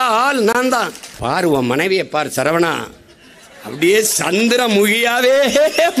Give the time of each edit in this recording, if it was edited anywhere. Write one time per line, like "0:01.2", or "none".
0:01.0